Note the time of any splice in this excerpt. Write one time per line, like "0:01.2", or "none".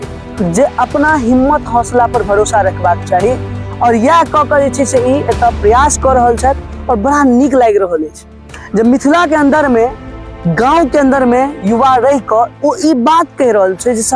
none